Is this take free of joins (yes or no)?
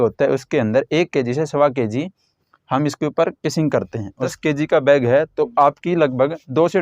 no